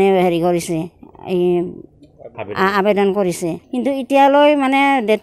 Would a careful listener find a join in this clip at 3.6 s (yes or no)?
yes